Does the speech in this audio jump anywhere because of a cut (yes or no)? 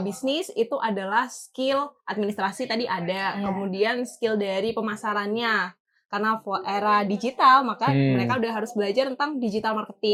no